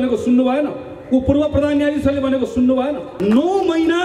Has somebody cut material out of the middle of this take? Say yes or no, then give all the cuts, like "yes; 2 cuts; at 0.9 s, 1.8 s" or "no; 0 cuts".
yes; 1 cut; at 3.1 s